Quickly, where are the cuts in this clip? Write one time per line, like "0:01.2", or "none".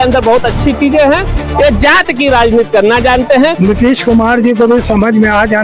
0:03.6